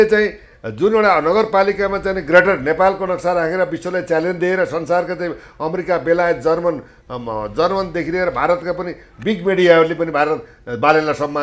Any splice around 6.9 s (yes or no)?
no